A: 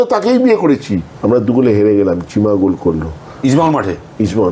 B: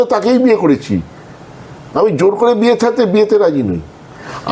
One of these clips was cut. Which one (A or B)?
A